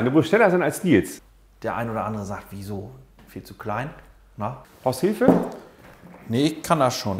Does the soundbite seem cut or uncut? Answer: cut